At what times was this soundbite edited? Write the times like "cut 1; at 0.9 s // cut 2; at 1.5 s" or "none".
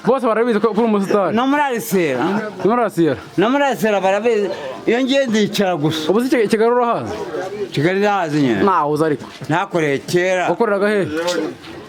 none